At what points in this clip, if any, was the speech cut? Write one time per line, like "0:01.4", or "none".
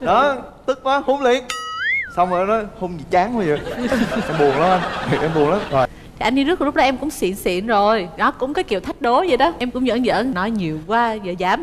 0:05.9